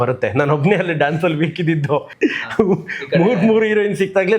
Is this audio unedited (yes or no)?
no